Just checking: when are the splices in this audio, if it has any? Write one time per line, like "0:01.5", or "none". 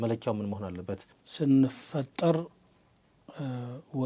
0:01.2